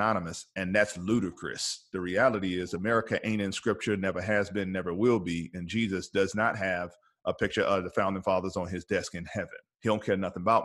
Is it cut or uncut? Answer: cut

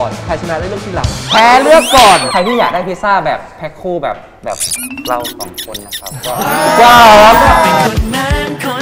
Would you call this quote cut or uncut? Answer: cut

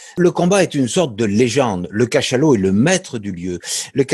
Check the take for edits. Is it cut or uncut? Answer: uncut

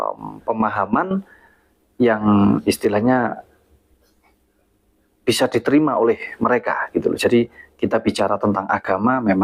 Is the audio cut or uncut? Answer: uncut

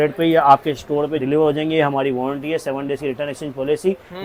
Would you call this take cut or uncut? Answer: uncut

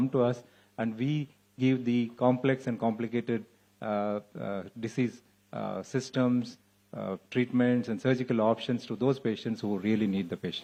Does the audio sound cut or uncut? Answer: uncut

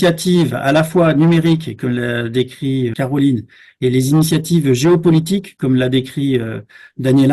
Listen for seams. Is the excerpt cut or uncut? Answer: cut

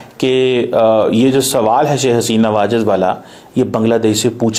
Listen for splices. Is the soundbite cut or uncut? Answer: uncut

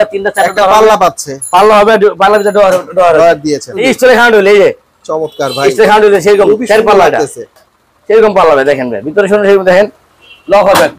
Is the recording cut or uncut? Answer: cut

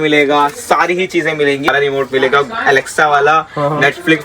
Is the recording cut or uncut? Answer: cut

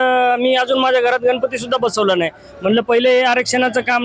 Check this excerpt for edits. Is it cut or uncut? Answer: uncut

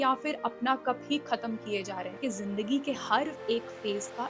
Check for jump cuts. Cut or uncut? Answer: cut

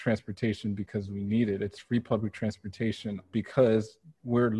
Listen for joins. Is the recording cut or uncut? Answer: cut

